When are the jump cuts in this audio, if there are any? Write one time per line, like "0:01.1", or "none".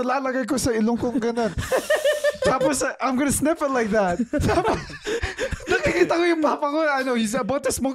none